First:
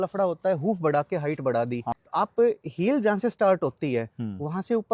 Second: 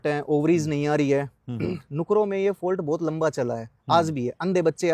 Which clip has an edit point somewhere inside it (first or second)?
first